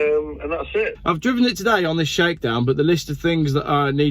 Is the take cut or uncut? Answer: cut